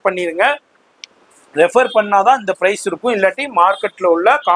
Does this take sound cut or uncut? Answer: uncut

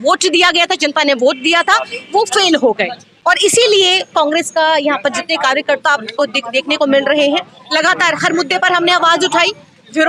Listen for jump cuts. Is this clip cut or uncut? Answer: uncut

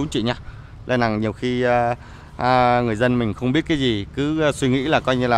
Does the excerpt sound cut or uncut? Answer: uncut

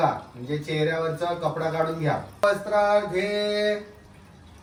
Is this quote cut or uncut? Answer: uncut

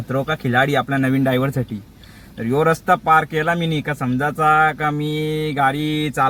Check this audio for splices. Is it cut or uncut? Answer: uncut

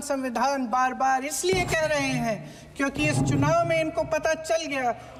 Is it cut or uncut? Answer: uncut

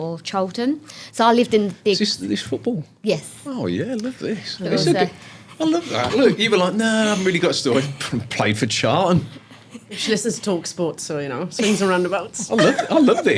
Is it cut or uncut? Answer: uncut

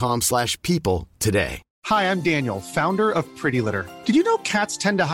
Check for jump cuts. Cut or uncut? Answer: cut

